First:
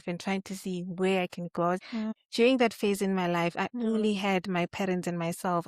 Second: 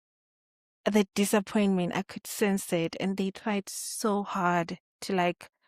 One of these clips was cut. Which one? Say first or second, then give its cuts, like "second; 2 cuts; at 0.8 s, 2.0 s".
first; 1 cut; at 2.0 s